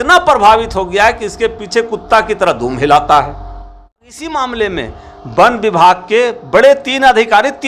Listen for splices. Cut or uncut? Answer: cut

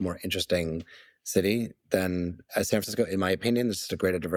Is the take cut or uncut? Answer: uncut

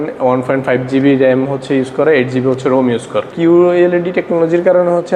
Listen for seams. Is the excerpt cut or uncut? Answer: cut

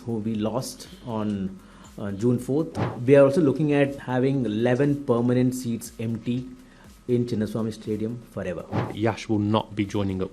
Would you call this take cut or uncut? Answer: cut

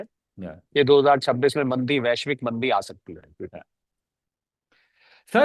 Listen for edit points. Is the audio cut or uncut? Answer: uncut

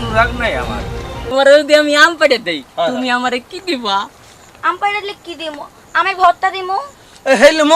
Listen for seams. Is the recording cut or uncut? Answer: cut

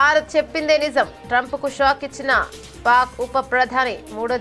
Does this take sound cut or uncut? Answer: uncut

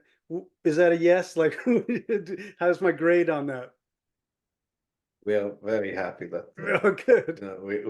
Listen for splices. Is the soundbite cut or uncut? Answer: uncut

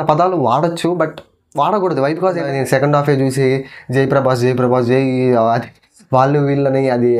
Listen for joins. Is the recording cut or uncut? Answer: cut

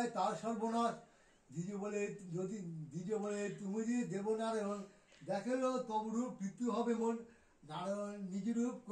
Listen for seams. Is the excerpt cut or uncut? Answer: uncut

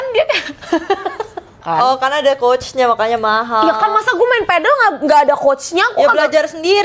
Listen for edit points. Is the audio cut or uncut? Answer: cut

